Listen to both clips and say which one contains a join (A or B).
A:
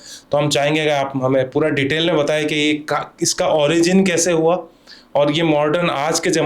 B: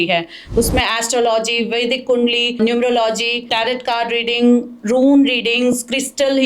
B